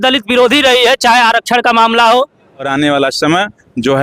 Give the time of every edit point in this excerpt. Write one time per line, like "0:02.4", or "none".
0:02.7